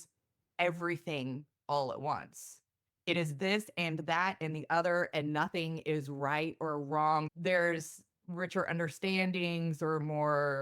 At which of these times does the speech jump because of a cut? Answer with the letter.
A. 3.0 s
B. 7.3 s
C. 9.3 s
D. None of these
B